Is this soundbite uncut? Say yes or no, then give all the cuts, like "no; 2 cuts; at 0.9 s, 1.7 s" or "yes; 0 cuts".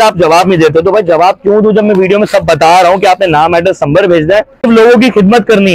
no; 1 cut; at 4.7 s